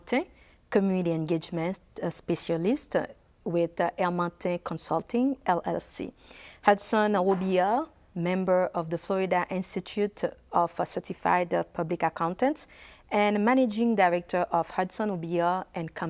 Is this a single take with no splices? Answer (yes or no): yes